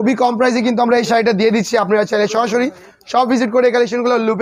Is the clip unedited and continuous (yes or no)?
yes